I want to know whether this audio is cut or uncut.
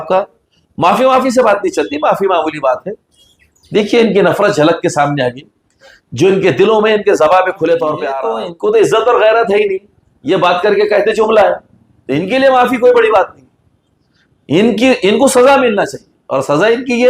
cut